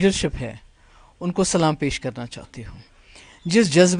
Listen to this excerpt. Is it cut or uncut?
uncut